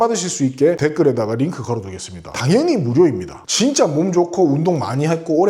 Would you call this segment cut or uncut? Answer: cut